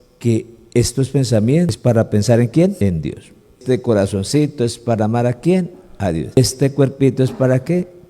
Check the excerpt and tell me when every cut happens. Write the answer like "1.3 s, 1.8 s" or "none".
1.8 s